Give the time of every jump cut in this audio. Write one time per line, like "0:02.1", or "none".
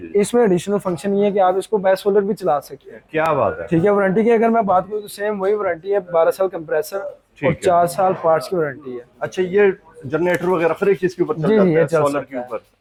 none